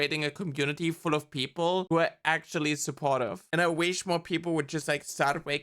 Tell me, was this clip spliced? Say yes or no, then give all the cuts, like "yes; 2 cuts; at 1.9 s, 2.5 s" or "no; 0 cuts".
yes; 2 cuts; at 1.9 s, 3.4 s